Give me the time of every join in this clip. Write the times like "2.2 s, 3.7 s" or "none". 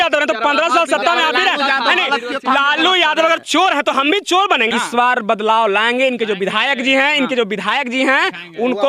4.7 s